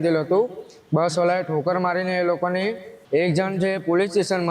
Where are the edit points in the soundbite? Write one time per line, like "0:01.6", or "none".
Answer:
0:02.9